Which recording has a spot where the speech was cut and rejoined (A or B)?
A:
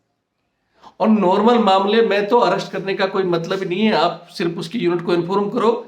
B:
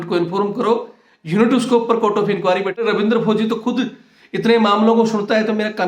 B